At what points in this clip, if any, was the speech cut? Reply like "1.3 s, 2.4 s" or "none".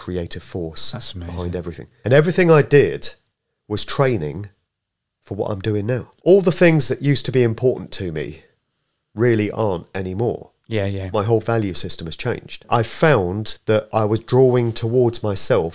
2.0 s, 6.1 s, 12.6 s